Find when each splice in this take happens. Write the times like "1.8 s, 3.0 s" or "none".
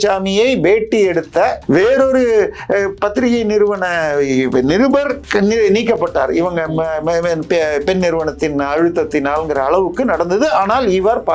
1.6 s, 5.2 s